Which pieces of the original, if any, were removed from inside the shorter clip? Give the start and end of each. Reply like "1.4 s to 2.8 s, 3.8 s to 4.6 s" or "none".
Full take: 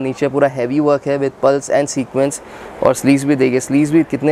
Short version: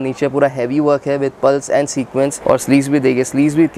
2.4 s to 2.7 s